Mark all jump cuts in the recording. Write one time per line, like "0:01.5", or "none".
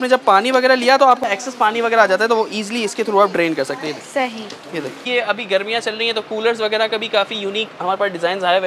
0:01.2
0:05.0